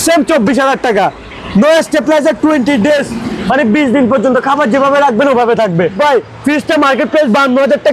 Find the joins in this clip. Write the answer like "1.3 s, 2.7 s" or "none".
6.0 s